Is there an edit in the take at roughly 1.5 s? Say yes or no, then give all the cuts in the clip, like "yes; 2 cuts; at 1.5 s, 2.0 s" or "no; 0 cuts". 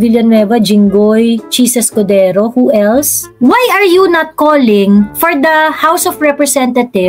no; 1 cut; at 3.2 s